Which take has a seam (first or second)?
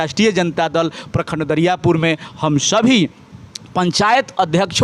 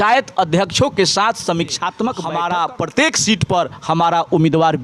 second